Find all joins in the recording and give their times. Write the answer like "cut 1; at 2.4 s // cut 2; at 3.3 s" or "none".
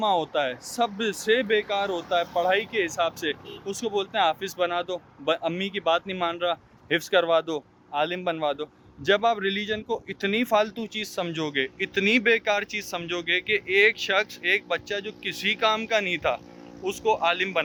none